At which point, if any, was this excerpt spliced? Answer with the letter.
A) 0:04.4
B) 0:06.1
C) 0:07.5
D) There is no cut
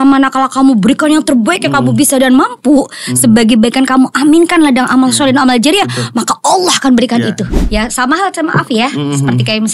C